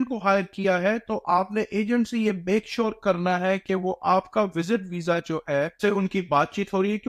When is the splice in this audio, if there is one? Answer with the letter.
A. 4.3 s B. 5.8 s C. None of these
B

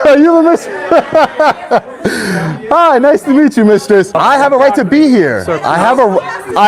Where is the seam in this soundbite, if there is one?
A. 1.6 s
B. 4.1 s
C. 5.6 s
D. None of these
B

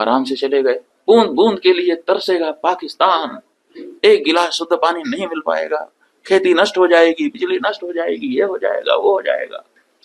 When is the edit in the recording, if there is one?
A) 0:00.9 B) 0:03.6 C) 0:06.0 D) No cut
A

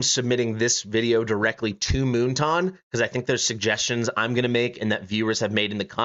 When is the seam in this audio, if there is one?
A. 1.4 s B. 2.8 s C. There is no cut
C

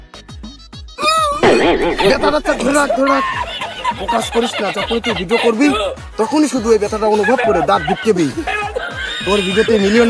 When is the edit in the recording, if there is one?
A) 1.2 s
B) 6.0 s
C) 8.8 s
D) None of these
D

